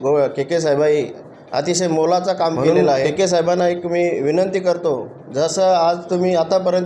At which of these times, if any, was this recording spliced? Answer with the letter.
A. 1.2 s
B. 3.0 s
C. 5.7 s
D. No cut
B